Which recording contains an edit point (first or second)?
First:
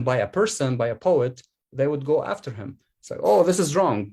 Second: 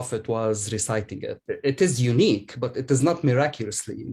second